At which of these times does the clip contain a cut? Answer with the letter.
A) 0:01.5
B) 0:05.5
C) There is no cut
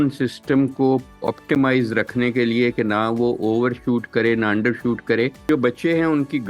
B